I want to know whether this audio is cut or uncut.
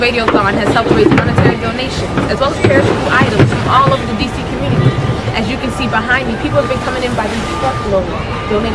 uncut